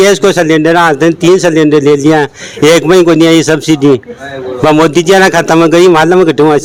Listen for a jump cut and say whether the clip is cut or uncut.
uncut